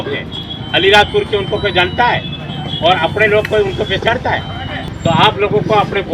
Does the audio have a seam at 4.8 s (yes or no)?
yes